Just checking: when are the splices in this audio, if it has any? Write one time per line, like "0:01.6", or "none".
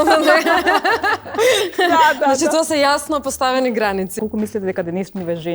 0:04.1